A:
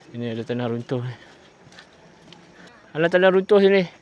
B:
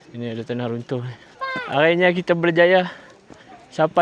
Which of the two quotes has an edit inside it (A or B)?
B